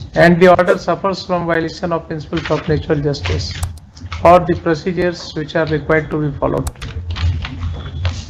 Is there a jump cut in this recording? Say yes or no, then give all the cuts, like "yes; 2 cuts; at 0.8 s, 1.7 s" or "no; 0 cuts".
no; 0 cuts